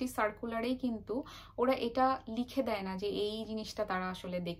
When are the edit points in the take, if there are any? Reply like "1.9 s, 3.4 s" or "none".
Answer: none